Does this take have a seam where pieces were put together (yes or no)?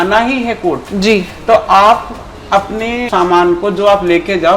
yes